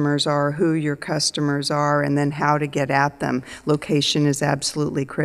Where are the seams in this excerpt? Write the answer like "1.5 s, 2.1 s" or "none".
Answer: 3.5 s